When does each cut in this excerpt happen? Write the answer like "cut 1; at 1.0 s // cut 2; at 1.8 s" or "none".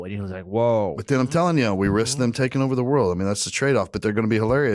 cut 1; at 1.0 s